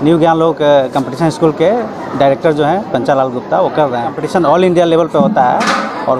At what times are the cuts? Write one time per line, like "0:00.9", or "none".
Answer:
0:04.2